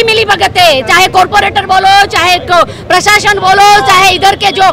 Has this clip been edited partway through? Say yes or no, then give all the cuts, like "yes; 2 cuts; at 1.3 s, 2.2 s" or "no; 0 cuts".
no; 0 cuts